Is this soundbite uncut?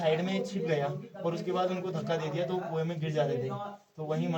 yes; 0 cuts

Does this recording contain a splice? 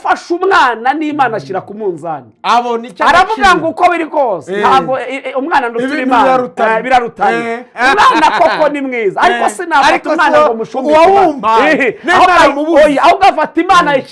no; 0 cuts

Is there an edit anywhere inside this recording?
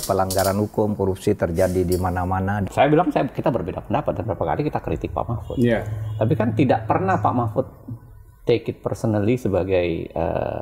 yes; 1 cut; at 2.6 s

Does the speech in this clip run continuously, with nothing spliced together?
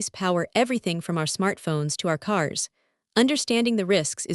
yes; 0 cuts

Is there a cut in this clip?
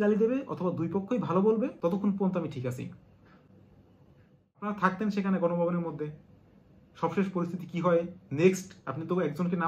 yes; 2 cuts; at 1.7 s, 4.7 s

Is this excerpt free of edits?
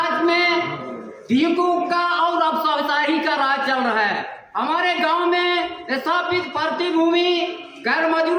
yes; 0 cuts

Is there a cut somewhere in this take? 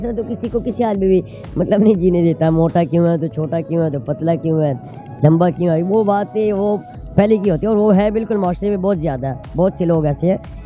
no; 0 cuts

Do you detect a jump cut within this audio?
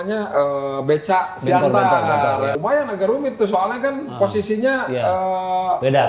yes; 1 cut; at 2.6 s

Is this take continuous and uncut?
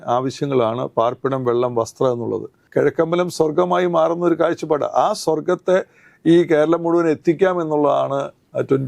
no; 1 cut; at 2.6 s

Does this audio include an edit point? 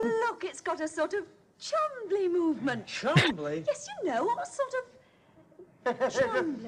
no; 0 cuts

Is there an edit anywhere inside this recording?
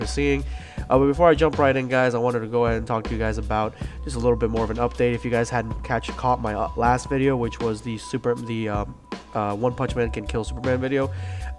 no; 0 cuts

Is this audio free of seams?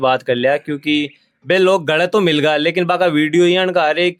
yes; 0 cuts

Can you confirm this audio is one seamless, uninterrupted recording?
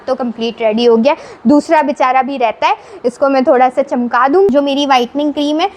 no; 1 cut; at 4.5 s

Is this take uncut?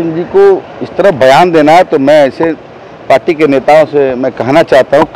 yes; 0 cuts

